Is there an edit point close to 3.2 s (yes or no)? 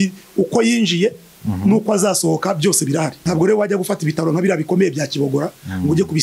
yes